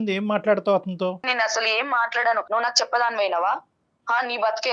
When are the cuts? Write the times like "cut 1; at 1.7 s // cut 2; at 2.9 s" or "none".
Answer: cut 1; at 1.3 s // cut 2; at 2.4 s